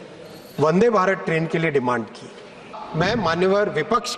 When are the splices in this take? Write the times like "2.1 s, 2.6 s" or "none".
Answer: 2.8 s